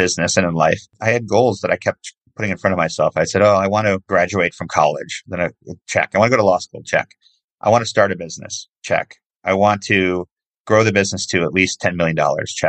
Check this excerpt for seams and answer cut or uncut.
cut